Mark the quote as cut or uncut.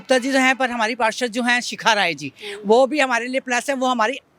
uncut